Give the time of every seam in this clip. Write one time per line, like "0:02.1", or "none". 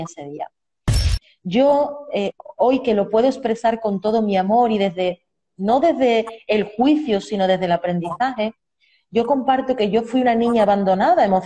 0:01.0